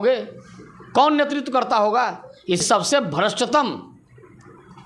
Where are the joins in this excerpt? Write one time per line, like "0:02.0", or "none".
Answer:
0:02.6